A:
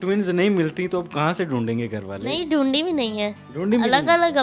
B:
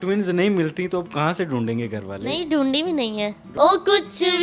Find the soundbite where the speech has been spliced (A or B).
B